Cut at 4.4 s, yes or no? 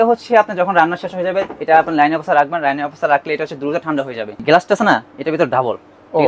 yes